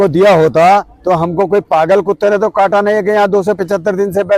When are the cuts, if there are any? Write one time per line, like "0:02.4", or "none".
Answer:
none